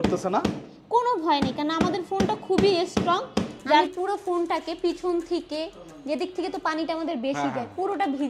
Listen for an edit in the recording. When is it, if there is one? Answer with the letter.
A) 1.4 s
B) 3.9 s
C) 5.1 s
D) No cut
B